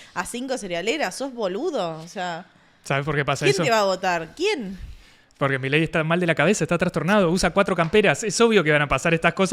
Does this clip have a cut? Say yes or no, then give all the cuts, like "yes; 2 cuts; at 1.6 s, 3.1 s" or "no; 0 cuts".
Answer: no; 0 cuts